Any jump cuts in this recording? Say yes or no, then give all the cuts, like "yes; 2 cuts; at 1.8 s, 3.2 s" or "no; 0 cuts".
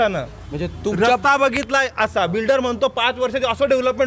no; 0 cuts